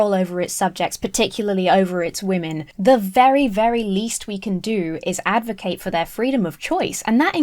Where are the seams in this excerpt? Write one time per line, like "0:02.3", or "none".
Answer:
0:02.6